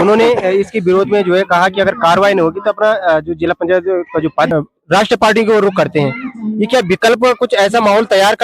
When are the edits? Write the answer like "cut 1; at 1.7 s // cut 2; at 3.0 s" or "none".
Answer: cut 1; at 4.5 s